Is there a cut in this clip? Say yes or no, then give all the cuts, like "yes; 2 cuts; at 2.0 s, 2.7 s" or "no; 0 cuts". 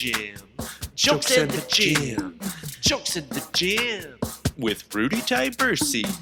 no; 0 cuts